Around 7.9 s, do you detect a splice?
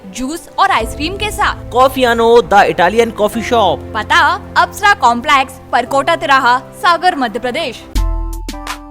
yes; 1 cut; at 7.9 s

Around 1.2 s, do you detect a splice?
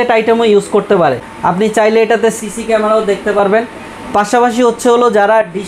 yes; 1 cut; at 1.2 s

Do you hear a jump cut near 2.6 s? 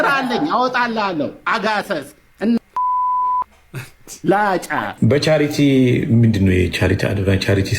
no; 1 cut; at 4.9 s

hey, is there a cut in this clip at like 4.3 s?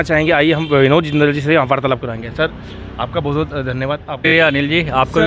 yes; 1 cut; at 4.3 s

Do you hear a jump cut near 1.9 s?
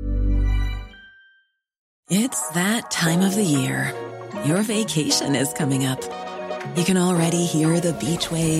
yes; 1 cut; at 1.9 s

